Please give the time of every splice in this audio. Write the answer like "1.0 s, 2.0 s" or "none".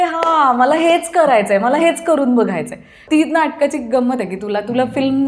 3.0 s